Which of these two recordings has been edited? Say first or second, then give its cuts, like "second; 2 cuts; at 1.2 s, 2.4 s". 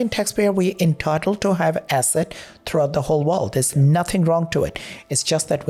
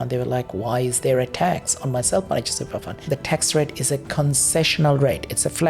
second; 1 cut; at 2.9 s